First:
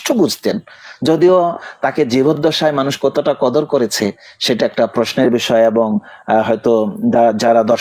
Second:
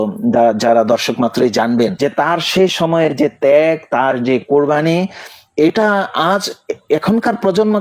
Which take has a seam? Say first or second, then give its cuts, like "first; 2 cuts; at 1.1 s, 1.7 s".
second; 1 cut; at 1.9 s